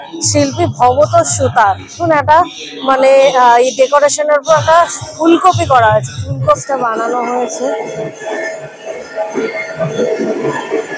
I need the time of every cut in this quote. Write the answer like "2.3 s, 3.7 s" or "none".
2.0 s, 6.6 s